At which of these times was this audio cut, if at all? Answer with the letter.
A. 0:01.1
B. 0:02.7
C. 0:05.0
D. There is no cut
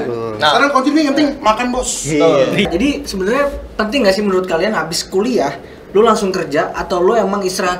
B